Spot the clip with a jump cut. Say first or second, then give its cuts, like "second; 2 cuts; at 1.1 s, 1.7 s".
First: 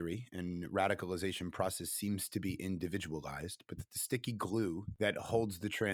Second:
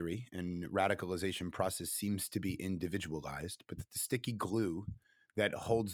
first; 1 cut; at 4.9 s